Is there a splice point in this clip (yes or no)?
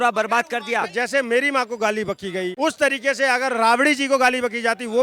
yes